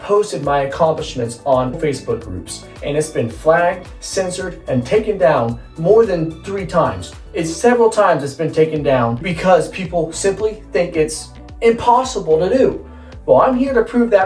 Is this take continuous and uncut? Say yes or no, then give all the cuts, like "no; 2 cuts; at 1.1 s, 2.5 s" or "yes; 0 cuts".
yes; 0 cuts